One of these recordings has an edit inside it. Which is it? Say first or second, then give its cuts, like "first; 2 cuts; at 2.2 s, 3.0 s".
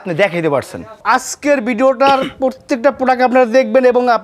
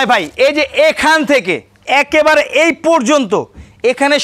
first; 1 cut; at 1.0 s